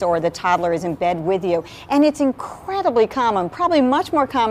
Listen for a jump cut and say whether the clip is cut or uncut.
cut